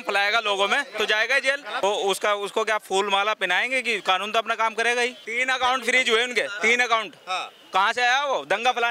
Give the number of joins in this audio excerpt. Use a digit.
2